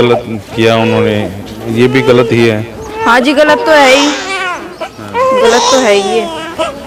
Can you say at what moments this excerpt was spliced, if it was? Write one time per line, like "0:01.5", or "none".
none